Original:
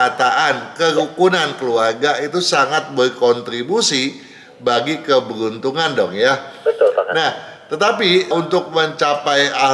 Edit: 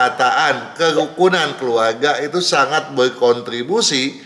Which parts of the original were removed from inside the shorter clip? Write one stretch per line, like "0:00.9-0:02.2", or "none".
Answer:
none